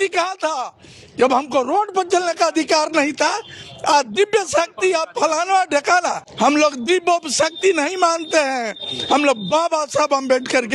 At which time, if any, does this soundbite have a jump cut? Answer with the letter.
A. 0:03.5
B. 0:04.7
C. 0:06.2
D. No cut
C